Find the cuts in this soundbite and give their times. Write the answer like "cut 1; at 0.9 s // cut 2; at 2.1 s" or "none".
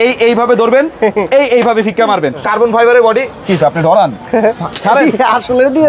cut 1; at 2.4 s